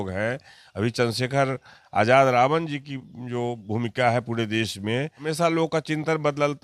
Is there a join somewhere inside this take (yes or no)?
yes